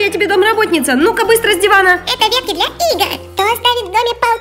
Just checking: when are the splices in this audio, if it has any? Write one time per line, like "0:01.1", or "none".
0:02.1
0:03.1